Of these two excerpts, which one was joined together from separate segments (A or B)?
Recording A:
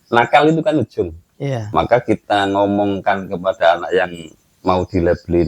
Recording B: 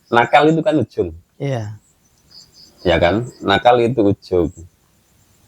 A